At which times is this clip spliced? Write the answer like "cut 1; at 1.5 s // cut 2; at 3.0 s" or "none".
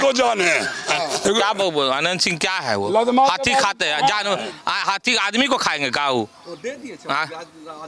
cut 1; at 1.2 s